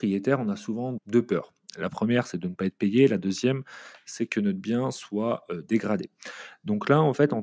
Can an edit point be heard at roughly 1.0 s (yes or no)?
yes